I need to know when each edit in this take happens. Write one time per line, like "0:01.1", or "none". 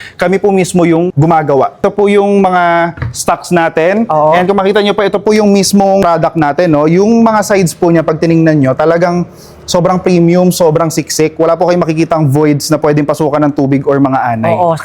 0:01.6
0:06.0